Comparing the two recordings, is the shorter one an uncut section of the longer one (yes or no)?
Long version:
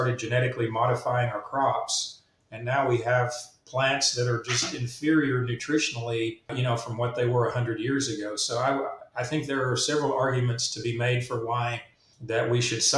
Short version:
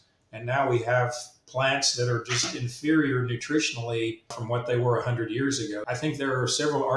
no